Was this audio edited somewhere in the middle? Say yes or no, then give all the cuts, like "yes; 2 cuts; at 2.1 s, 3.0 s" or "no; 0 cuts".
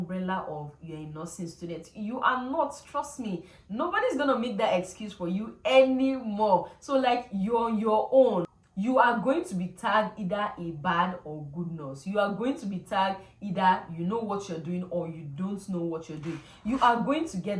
no; 0 cuts